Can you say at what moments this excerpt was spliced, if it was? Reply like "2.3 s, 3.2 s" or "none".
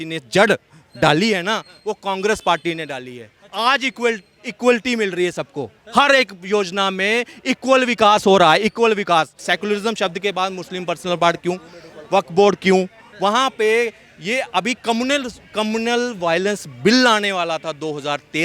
9.4 s